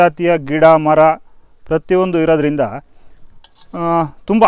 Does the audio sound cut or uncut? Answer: uncut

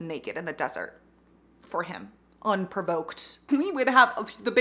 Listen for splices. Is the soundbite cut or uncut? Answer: cut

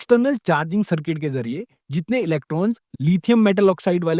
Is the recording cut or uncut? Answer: uncut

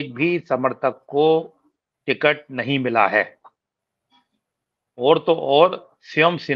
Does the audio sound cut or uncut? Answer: uncut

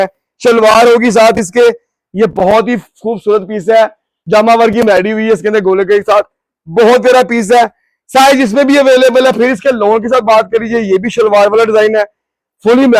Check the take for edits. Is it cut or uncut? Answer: uncut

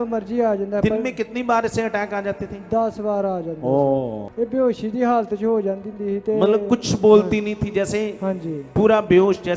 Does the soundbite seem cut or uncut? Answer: cut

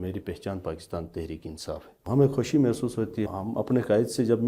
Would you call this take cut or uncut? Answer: cut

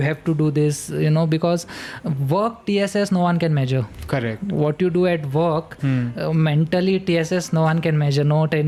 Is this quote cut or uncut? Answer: uncut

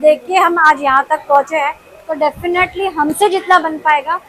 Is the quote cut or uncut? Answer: uncut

